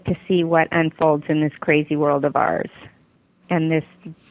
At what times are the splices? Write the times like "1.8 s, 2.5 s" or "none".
3.3 s